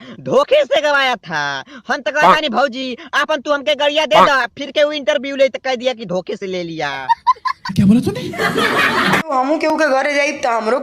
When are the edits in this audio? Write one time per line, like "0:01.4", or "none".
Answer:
0:09.3